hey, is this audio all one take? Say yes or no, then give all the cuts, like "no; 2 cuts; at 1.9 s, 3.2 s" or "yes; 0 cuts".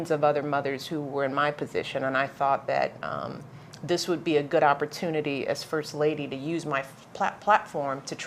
no; 1 cut; at 4.5 s